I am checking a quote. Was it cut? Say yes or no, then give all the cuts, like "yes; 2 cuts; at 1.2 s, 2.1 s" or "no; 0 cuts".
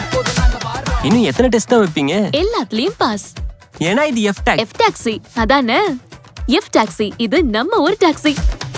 no; 0 cuts